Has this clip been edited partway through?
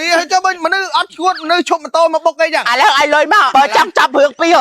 yes; 1 cut; at 3.5 s

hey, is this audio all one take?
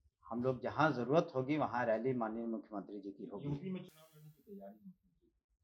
yes; 0 cuts

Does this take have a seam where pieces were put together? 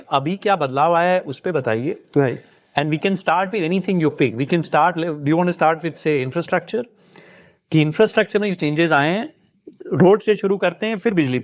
no; 0 cuts

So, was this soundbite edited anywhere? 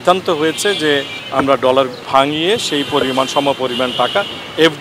yes; 2 cuts; at 1.2 s, 2.0 s

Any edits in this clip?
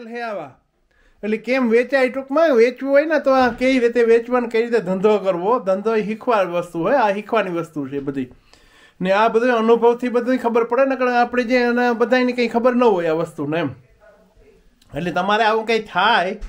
no; 0 cuts

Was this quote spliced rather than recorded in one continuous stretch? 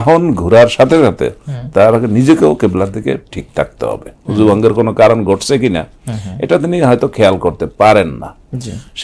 yes; 1 cut; at 4.2 s

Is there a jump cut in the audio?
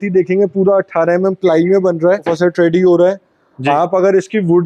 yes; 1 cut; at 2.3 s

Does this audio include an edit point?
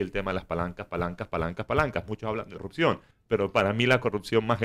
yes; 1 cut; at 2.9 s

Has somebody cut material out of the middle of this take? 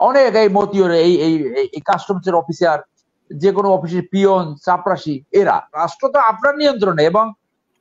yes; 1 cut; at 5.8 s

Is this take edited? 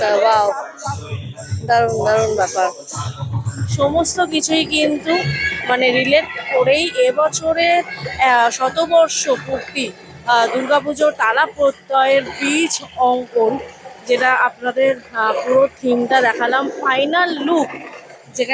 yes; 1 cut; at 3.7 s

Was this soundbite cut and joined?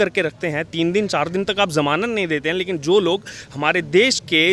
no; 0 cuts

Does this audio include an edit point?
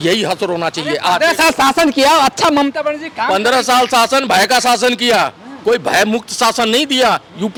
no; 0 cuts

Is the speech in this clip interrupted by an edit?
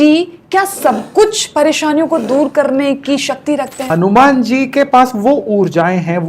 yes; 1 cut; at 3.8 s

